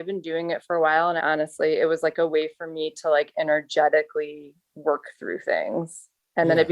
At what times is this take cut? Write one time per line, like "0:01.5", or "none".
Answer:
0:01.2